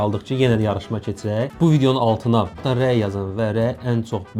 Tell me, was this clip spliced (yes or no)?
no